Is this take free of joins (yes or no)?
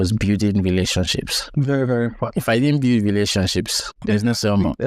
no